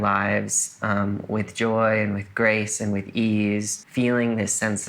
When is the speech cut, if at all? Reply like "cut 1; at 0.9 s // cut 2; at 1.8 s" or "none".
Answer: cut 1; at 3.8 s